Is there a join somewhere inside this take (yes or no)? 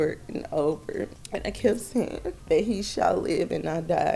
yes